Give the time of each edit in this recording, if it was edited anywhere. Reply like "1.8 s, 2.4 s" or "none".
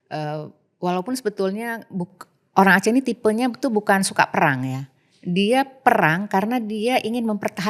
none